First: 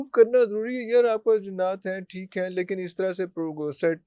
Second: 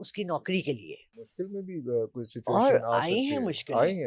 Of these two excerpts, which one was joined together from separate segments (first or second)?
second